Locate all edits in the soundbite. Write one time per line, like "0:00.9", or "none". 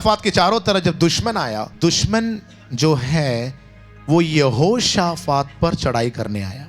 0:01.7

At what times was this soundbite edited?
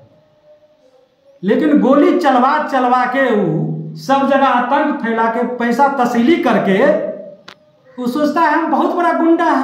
none

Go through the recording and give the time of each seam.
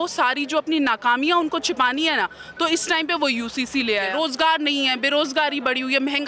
0:04.1

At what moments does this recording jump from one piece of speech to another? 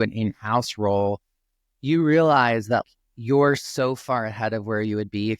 0:02.9

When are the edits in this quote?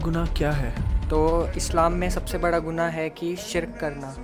none

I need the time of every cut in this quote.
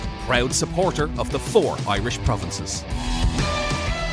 none

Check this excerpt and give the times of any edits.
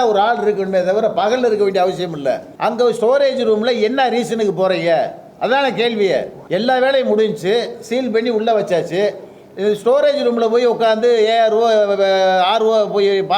0:02.5
0:06.4

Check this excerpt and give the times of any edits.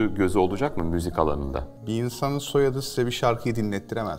0:01.7

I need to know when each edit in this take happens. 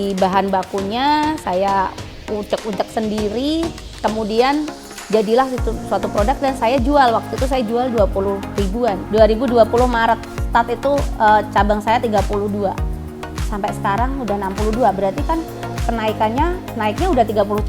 0:09.0
0:16.6

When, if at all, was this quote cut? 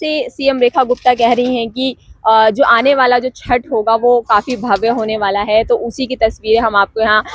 none

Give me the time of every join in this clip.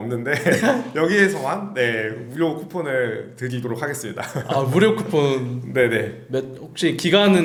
none

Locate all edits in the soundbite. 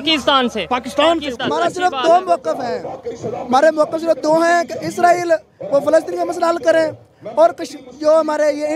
0:01.3

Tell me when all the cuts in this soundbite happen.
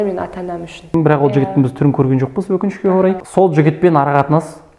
0:00.9
0:03.2

